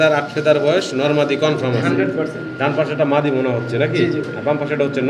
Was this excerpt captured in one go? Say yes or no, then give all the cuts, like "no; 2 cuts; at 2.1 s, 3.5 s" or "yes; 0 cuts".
yes; 0 cuts